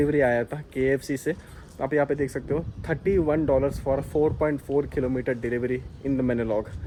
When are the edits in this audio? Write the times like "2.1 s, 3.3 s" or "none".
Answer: none